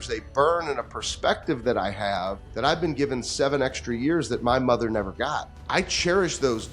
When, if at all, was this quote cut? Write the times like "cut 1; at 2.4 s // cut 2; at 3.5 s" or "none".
cut 1; at 2.4 s // cut 2; at 5.5 s